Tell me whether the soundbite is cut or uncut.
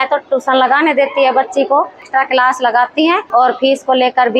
cut